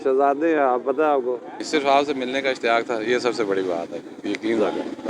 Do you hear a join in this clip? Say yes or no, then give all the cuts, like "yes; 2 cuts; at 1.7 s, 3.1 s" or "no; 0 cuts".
yes; 1 cut; at 1.6 s